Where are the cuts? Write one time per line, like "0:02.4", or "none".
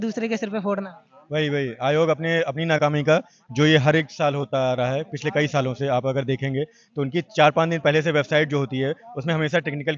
none